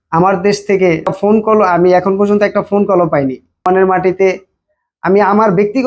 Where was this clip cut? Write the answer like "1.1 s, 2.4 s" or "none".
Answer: 1.1 s, 3.6 s

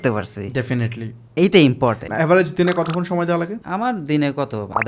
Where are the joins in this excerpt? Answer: 2.1 s, 3.6 s

